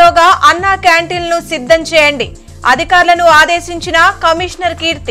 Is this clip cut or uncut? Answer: uncut